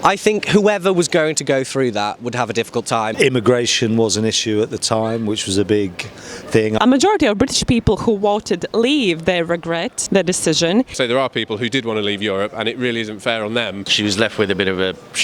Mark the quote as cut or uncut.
cut